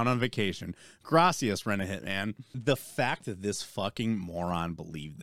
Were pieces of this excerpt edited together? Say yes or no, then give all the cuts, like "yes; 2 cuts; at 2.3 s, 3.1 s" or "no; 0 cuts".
yes; 1 cut; at 2.5 s